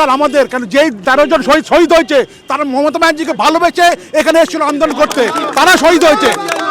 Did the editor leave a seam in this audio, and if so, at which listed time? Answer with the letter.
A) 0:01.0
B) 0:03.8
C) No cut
A